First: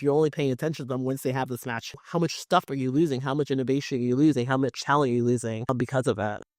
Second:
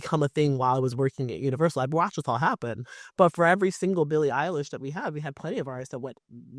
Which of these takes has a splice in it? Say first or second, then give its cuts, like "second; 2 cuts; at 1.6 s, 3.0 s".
first; 2 cuts; at 1.8 s, 5.7 s